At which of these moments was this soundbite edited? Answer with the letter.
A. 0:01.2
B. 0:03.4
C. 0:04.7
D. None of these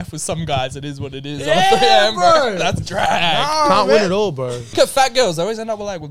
C